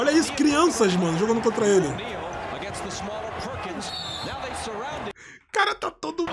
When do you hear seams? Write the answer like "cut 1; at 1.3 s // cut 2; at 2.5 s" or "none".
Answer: none

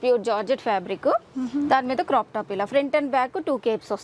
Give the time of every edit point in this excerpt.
none

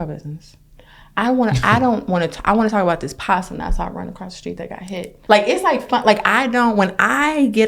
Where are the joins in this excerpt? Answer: cut 1; at 5.1 s

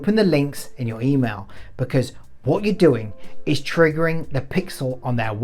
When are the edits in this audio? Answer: none

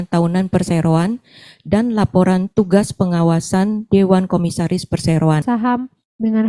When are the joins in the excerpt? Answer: cut 1; at 5.4 s

